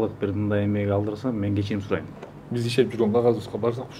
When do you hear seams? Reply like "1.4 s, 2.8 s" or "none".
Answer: 2.2 s